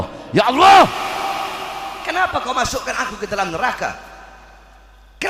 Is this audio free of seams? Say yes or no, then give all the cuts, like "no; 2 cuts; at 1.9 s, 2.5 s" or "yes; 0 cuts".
yes; 0 cuts